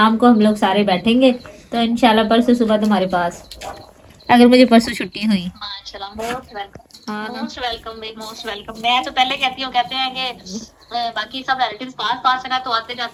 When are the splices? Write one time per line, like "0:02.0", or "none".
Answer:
none